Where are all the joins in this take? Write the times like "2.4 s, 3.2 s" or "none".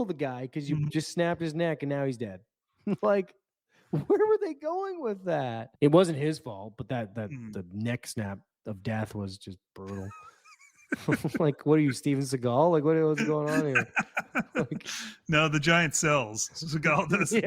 5.7 s